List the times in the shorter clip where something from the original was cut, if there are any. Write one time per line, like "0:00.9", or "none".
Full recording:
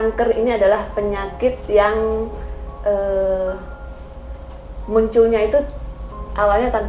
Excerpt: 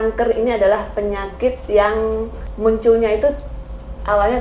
0:02.4